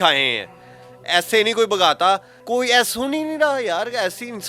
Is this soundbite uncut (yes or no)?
no